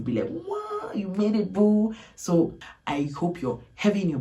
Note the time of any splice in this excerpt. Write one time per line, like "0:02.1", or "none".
0:02.6